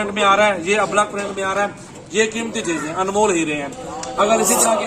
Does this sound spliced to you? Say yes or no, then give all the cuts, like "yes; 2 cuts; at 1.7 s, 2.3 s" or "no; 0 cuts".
no; 0 cuts